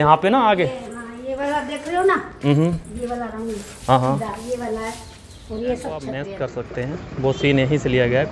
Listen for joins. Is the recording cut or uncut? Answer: cut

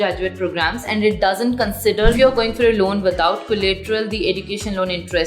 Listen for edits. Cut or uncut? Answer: cut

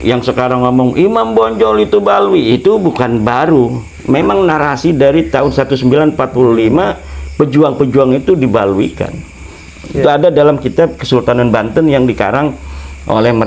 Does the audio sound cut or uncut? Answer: uncut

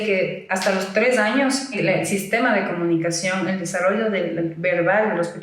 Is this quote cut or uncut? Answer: cut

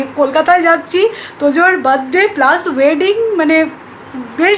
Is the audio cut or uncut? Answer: uncut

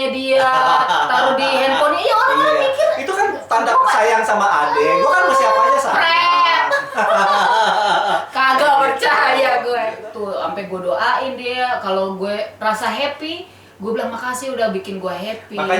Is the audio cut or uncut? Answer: cut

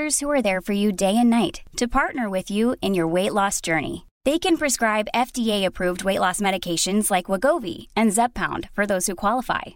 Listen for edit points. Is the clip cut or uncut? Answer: uncut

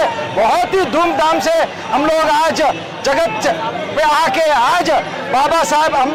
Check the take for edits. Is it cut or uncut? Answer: uncut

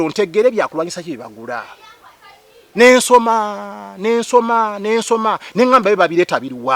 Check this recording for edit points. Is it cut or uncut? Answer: uncut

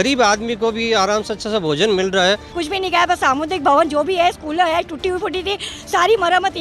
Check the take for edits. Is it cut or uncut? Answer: cut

